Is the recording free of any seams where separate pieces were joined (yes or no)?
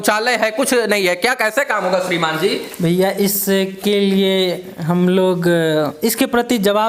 yes